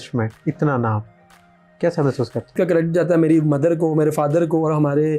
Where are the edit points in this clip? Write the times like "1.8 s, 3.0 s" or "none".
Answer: 2.5 s